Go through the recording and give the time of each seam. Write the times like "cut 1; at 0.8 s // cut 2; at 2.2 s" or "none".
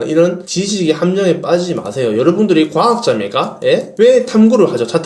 cut 1; at 3.9 s